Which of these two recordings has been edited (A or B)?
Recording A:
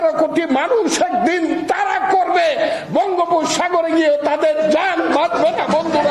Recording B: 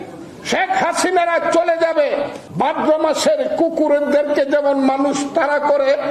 B